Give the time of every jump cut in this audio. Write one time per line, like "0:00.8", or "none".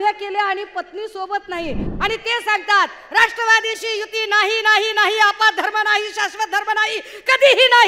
0:01.8

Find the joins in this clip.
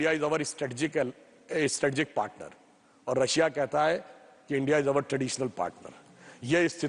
none

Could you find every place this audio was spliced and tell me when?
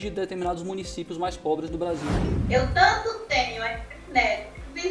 0:02.2

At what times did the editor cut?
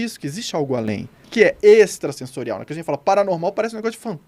0:01.1

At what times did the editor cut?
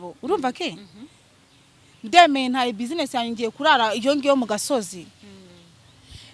none

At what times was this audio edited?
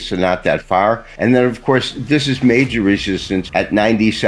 0:01.1
0:03.5

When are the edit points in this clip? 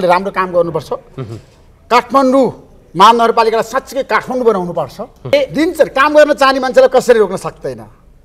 0:05.3

